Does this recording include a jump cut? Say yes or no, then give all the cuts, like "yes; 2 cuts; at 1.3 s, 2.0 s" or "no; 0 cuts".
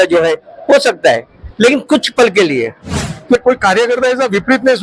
yes; 1 cut; at 3.4 s